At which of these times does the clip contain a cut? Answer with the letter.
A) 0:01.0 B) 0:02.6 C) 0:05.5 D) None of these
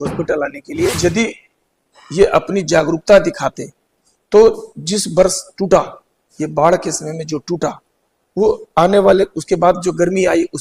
A